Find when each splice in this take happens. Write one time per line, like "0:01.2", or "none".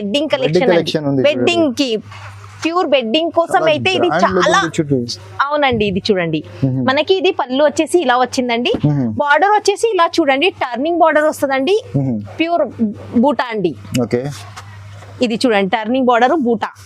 none